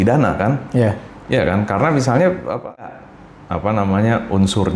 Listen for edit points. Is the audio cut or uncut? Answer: cut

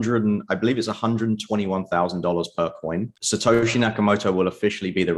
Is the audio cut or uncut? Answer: cut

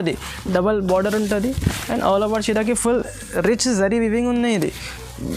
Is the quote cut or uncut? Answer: uncut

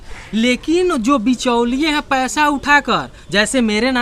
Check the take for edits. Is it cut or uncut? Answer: uncut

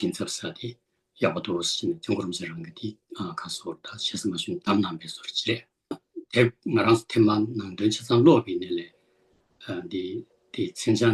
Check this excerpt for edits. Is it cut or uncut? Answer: cut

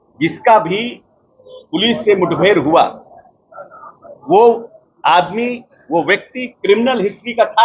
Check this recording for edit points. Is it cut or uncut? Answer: uncut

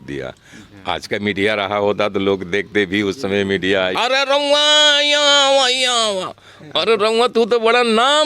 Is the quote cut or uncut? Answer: cut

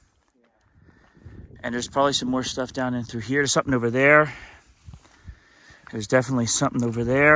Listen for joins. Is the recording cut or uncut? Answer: cut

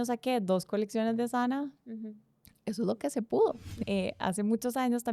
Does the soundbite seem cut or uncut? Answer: cut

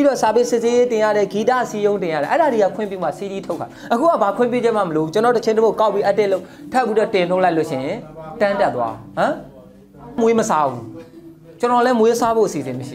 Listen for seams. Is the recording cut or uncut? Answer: uncut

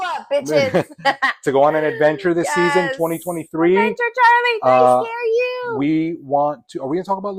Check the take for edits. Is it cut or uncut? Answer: uncut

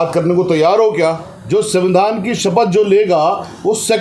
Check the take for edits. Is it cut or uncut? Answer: cut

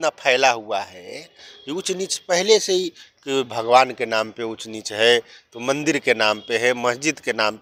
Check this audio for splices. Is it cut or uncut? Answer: uncut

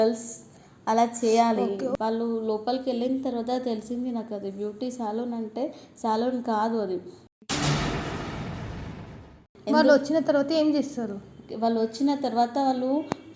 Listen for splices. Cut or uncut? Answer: cut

